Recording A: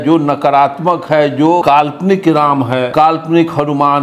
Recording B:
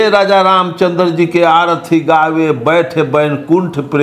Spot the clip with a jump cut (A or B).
A